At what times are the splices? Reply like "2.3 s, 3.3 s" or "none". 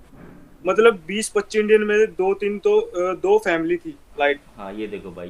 4.1 s